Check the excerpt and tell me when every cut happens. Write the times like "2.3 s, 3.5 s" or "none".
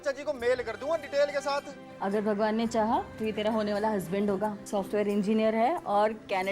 1.8 s, 4.6 s